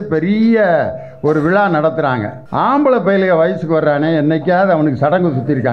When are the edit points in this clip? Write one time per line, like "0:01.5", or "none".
0:02.4